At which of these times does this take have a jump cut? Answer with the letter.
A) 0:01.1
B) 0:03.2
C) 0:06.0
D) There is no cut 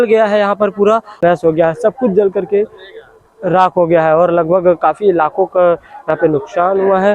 A